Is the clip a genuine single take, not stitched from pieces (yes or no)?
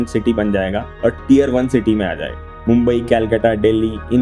yes